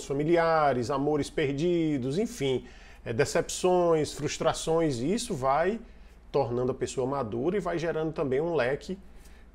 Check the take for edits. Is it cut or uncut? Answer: uncut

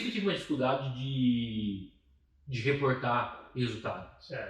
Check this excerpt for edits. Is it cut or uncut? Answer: uncut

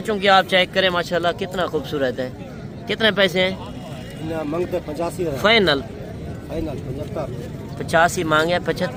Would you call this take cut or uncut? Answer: uncut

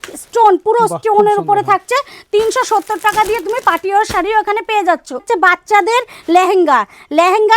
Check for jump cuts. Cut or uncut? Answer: cut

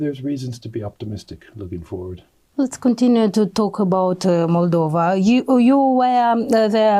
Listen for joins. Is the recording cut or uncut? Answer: uncut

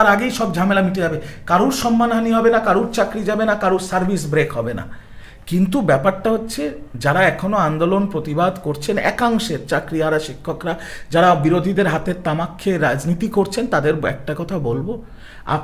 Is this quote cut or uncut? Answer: uncut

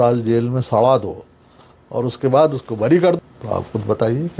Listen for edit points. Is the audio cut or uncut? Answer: cut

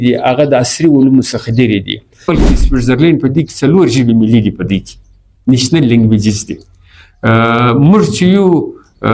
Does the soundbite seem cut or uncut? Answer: cut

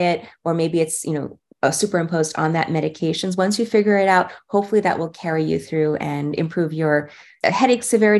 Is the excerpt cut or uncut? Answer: cut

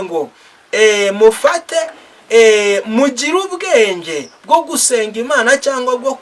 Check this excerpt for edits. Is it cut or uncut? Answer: uncut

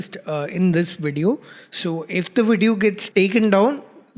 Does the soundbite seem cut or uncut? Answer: cut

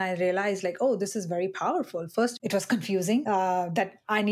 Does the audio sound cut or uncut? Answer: cut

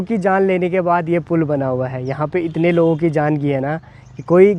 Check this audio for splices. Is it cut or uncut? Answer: uncut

